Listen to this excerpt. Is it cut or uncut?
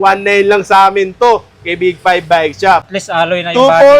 cut